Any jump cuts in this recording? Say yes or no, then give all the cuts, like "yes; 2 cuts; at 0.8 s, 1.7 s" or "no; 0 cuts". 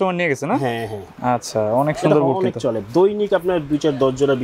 no; 0 cuts